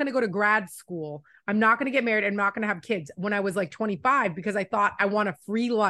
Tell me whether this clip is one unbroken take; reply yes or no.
yes